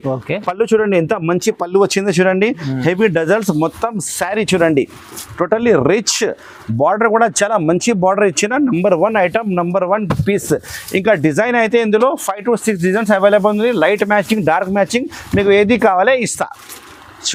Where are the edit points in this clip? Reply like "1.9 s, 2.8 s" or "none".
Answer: none